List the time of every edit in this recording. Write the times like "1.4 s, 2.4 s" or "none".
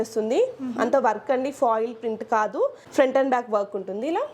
2.8 s